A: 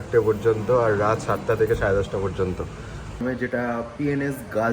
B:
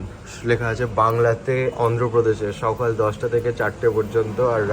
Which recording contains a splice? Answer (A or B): A